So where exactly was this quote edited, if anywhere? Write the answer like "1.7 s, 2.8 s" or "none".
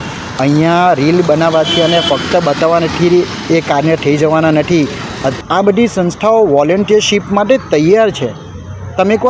5.4 s